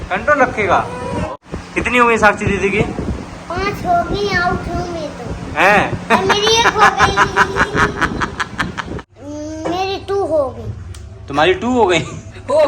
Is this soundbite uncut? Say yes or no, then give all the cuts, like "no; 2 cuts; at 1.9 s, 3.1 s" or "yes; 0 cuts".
no; 2 cuts; at 1.3 s, 9.0 s